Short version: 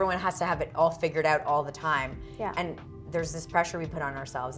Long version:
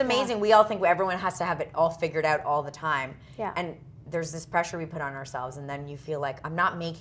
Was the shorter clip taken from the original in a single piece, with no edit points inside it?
yes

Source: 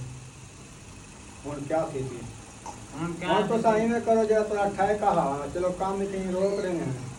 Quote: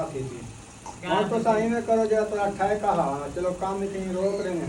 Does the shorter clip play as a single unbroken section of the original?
no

